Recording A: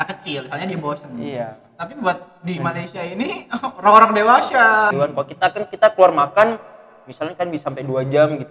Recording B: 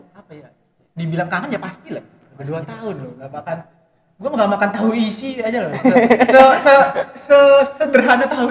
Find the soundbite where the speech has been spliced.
A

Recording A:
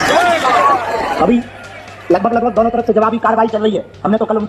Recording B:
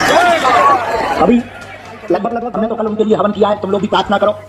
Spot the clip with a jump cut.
B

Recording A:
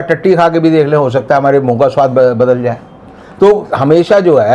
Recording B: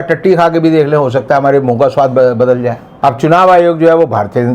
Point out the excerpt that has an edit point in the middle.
B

